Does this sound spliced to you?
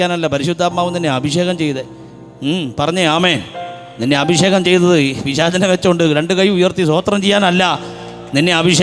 no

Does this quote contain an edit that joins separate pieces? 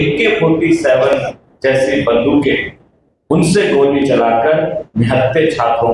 no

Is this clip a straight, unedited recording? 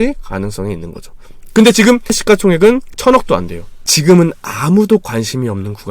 no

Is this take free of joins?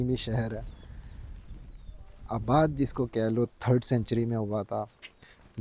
yes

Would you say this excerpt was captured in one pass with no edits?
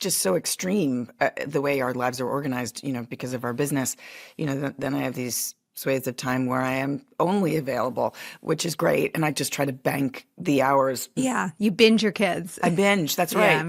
yes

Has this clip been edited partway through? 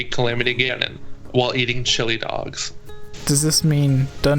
yes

